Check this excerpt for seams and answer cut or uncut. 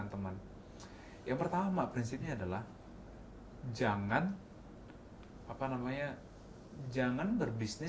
uncut